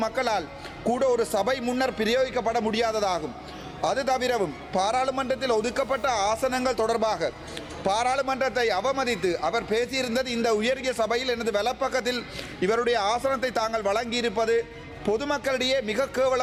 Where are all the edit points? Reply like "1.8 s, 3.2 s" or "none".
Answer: none